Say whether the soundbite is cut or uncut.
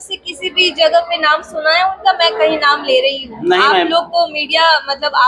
uncut